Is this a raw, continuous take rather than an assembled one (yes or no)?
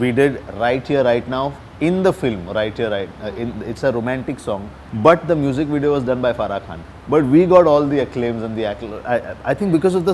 yes